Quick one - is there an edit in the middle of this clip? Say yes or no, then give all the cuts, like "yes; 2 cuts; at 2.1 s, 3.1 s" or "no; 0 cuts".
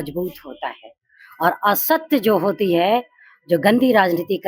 no; 0 cuts